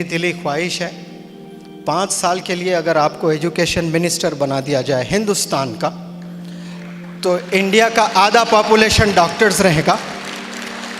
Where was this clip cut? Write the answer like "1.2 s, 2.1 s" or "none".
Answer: none